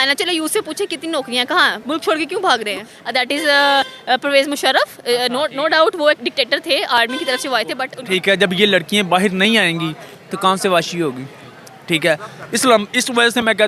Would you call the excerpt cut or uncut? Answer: cut